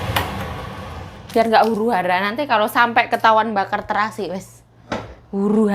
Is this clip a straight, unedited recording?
yes; 0 cuts

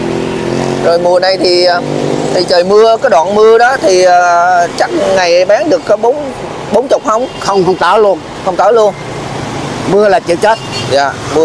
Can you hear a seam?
no; 0 cuts

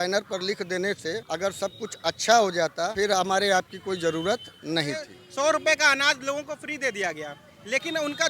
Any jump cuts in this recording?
yes; 3 cuts; at 1.2 s, 2.9 s, 5.2 s

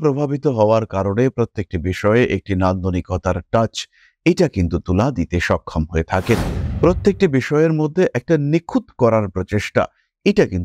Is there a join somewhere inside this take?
no; 0 cuts

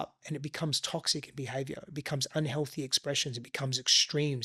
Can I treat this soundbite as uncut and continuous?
yes; 0 cuts

